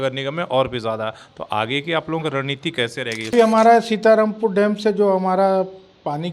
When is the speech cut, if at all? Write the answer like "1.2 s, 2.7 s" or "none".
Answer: 3.3 s